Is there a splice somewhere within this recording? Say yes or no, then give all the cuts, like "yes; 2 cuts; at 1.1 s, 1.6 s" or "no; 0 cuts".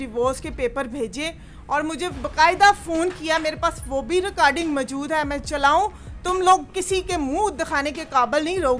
no; 0 cuts